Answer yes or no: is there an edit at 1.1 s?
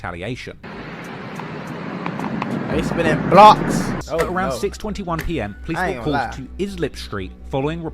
no